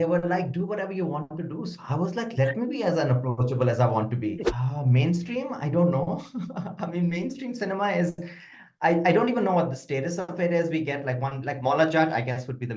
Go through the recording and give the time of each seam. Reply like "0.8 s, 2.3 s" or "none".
4.4 s